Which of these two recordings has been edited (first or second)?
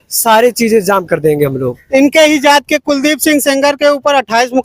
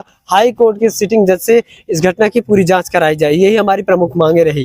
first